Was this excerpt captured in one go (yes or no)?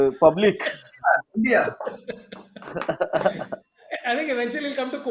yes